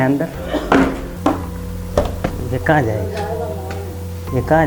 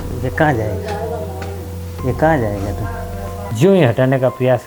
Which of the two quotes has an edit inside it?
first; 1 cut; at 1.1 s

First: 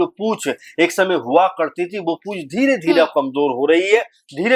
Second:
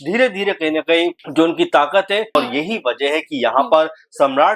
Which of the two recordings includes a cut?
second; 2 cuts; at 1.2 s, 2.4 s

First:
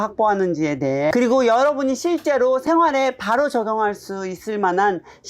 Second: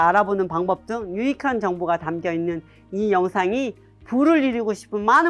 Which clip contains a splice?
first; 1 cut; at 1.1 s

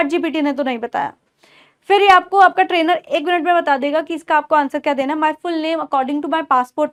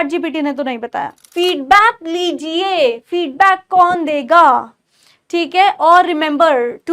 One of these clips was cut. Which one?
second; 1 cut; at 1.2 s

